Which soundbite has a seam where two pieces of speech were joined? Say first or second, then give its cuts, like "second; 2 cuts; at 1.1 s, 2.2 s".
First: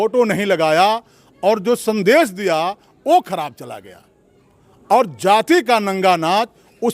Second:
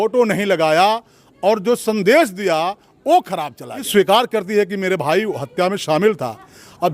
second; 1 cut; at 3.9 s